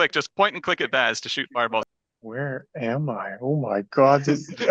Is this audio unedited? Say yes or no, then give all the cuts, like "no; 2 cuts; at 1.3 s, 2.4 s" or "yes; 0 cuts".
no; 1 cut; at 1.8 s